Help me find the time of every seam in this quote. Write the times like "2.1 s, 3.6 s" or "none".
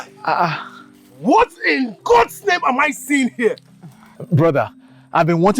none